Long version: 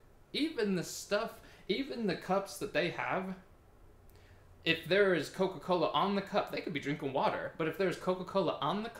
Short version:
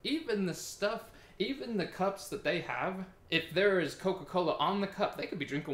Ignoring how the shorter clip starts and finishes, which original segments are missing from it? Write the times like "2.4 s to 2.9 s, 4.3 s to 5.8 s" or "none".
3.4 s to 4.5 s